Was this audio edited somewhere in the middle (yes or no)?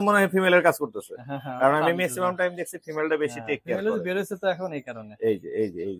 no